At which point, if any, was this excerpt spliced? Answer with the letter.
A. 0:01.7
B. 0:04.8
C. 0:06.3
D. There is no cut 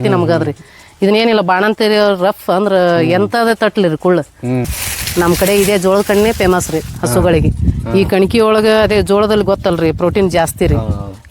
B